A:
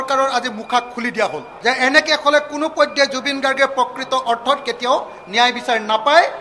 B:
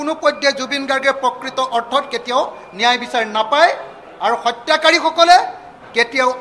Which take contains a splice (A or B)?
A